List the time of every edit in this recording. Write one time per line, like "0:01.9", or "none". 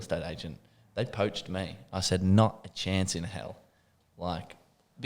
none